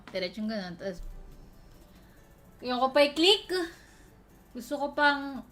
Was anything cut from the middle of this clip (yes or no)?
no